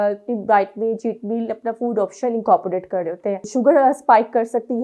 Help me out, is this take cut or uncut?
cut